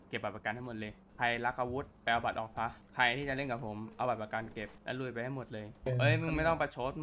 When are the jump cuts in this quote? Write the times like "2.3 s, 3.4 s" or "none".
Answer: 1.0 s, 1.9 s, 2.8 s, 4.8 s, 5.9 s